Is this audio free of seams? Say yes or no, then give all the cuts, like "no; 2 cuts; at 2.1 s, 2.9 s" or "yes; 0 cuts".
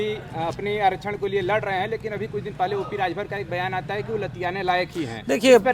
yes; 0 cuts